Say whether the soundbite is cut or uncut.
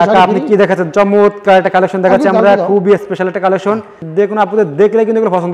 cut